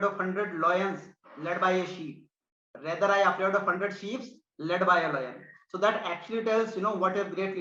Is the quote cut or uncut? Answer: uncut